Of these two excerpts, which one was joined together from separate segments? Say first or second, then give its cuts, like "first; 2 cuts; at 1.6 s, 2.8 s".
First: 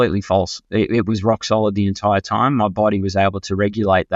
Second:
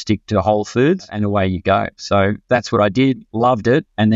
second; 1 cut; at 1.2 s